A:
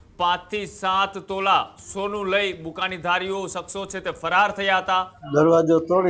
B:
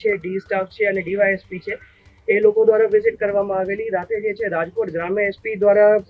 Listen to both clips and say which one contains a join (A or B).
A